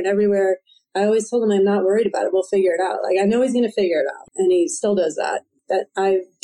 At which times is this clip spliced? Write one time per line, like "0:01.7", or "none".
0:04.2
0:05.5